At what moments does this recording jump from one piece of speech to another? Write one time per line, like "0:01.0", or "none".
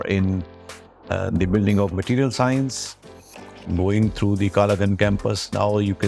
0:03.6